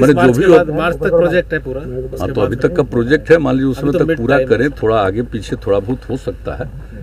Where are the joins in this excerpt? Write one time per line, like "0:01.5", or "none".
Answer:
none